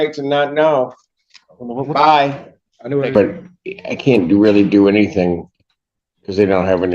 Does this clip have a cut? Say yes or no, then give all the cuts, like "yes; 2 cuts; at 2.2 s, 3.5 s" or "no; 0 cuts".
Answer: yes; 1 cut; at 3.1 s